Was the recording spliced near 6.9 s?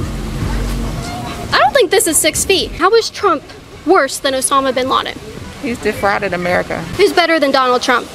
yes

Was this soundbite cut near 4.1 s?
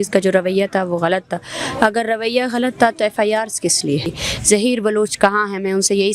yes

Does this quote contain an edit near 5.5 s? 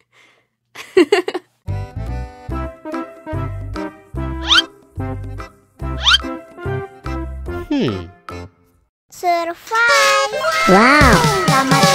no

